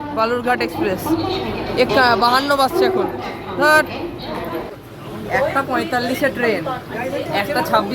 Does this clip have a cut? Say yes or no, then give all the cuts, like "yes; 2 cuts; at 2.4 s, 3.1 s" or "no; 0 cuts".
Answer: yes; 1 cut; at 4.7 s